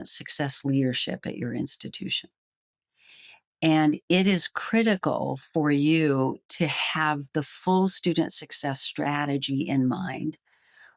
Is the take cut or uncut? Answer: uncut